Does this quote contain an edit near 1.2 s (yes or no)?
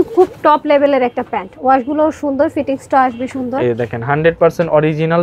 no